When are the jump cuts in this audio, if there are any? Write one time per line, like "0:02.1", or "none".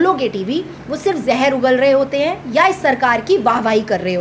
none